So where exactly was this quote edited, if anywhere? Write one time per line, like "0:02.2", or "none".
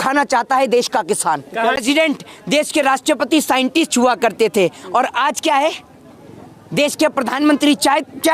0:01.8

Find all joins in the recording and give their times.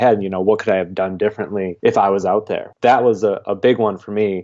0:01.7
0:02.7

